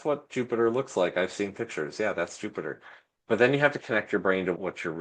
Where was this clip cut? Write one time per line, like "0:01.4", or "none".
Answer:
0:03.8